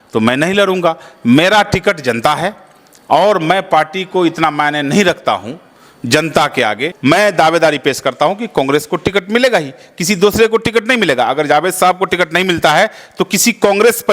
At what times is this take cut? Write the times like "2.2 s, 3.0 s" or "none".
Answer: 6.9 s